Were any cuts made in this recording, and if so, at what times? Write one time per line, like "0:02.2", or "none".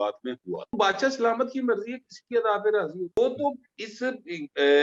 0:00.7
0:03.2